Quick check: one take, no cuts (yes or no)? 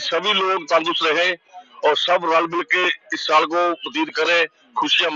yes